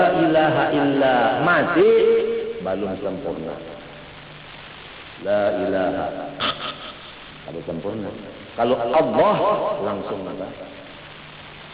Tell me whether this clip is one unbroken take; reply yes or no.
yes